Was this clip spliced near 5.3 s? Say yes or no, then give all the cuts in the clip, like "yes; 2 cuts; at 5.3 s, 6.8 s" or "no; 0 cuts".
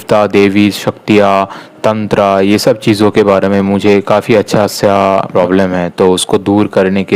yes; 1 cut; at 5.3 s